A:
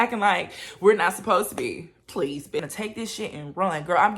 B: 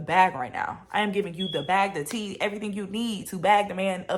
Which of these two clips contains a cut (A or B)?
A